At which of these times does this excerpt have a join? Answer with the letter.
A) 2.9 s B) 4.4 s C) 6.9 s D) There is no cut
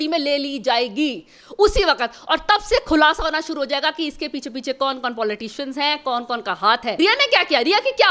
C